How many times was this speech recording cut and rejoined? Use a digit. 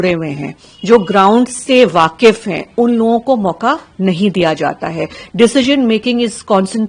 0